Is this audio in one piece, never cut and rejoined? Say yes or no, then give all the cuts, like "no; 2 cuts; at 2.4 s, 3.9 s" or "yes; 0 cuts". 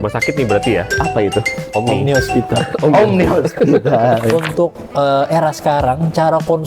no; 1 cut; at 4.3 s